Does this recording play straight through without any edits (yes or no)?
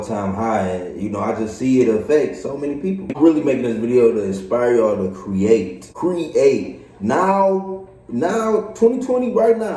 no